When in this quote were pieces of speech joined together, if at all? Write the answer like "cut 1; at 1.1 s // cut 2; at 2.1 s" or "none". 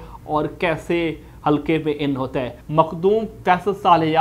cut 1; at 2.6 s